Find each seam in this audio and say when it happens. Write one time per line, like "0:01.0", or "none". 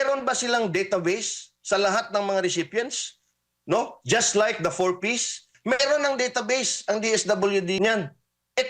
0:05.5
0:07.8